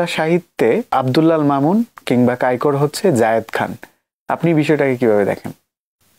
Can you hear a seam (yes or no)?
yes